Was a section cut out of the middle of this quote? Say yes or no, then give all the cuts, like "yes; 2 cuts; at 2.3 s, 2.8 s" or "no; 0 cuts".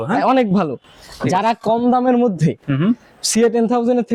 no; 0 cuts